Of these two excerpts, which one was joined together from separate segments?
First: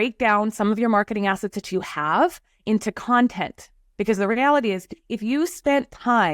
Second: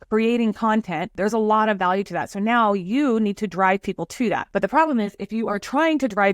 second; 2 cuts; at 1.1 s, 4.4 s

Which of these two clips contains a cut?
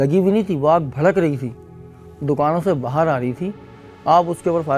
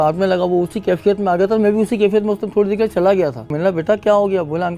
second; 1 cut; at 3.5 s

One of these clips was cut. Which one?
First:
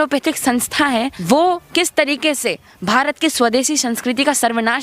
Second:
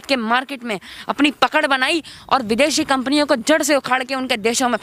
first; 1 cut; at 1.2 s

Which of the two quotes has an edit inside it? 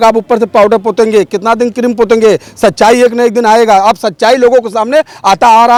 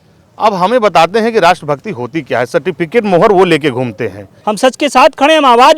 second; 1 cut; at 4.3 s

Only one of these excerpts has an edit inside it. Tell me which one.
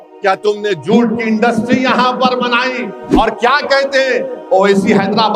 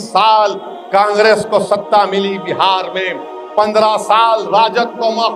first; 1 cut; at 3.0 s

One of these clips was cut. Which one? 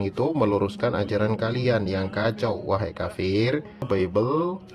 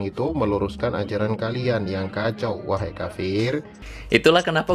first; 1 cut; at 3.9 s

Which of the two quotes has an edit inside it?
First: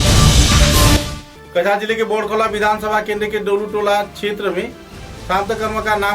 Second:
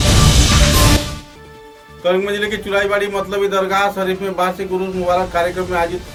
first; 1 cut; at 0.9 s

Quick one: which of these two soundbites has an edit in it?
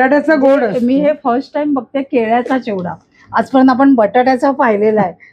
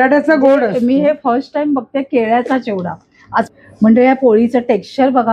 second; 1 cut; at 3.5 s

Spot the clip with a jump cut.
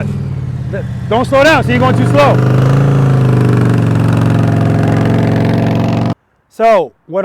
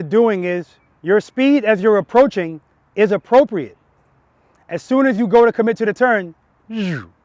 first; 1 cut; at 6.1 s

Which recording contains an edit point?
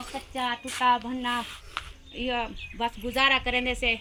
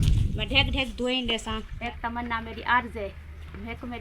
second; 1 cut; at 1.7 s

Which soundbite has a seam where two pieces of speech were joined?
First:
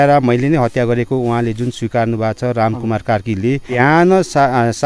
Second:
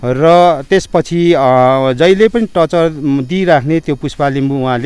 first; 1 cut; at 3.8 s

